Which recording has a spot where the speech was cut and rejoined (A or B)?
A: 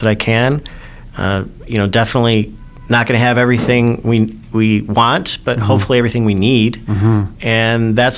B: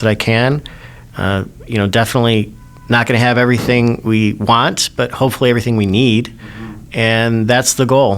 B